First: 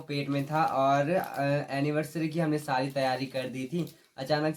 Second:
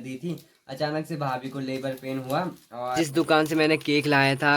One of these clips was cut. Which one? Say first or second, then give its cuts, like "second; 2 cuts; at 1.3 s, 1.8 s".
second; 1 cut; at 3.0 s